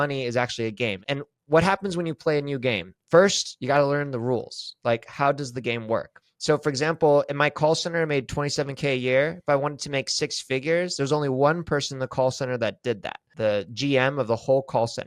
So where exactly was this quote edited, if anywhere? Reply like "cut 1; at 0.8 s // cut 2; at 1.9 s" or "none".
cut 1; at 1.0 s // cut 2; at 2.9 s // cut 3; at 6.2 s // cut 4; at 13.2 s